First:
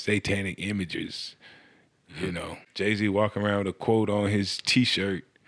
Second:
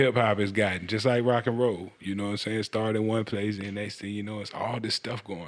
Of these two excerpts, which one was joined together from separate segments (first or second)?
first